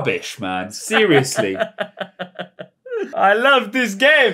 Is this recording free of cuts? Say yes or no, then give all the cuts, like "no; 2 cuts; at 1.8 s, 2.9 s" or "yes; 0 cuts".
no; 1 cut; at 3.1 s